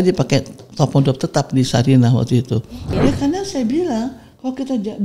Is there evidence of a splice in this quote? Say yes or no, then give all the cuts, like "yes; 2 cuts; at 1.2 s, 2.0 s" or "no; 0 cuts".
yes; 1 cut; at 2.9 s